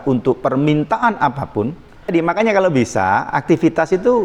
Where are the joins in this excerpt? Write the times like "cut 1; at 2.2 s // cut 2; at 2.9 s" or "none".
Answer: cut 1; at 2.1 s